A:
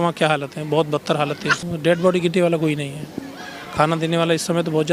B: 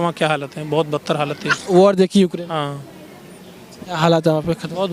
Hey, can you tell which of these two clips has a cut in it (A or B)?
A